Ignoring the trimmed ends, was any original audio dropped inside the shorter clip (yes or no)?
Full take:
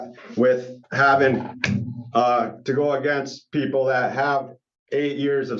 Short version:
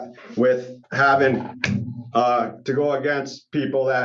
no